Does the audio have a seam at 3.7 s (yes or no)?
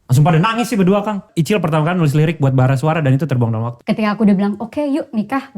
yes